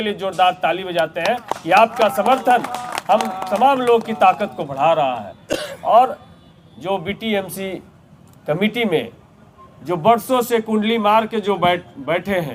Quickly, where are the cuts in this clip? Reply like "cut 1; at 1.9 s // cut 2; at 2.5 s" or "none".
none